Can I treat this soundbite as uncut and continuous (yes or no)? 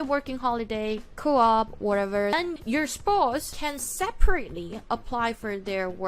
no